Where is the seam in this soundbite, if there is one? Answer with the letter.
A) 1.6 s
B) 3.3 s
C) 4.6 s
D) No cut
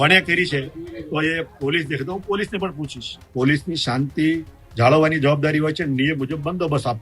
B